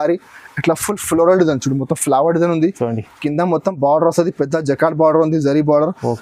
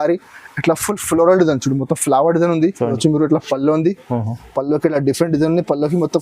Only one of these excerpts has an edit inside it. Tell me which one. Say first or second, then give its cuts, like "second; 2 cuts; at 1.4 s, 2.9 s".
second; 1 cut; at 3.0 s